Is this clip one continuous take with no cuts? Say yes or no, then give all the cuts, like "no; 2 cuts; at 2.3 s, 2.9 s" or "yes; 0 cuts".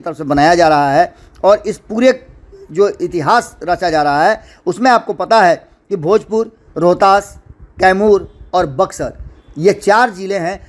yes; 0 cuts